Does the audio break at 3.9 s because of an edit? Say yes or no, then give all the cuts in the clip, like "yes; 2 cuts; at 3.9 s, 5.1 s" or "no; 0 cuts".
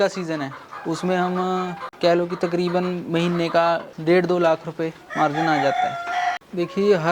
yes; 3 cuts; at 1.8 s, 3.9 s, 6.3 s